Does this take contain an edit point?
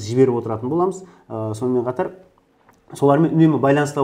no; 0 cuts

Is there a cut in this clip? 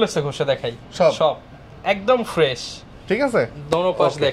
no; 0 cuts

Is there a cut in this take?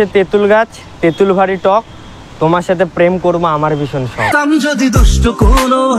no; 0 cuts

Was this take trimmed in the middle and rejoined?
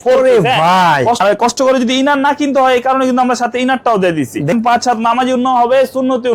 yes; 2 cuts; at 1.2 s, 4.5 s

